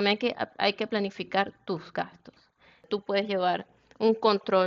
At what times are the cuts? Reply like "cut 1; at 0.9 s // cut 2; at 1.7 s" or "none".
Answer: cut 1; at 2.8 s

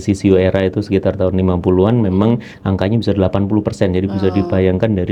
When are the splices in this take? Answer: none

